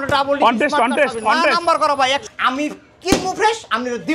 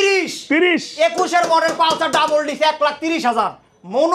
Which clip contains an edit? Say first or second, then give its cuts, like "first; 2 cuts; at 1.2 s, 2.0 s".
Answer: first; 1 cut; at 2.3 s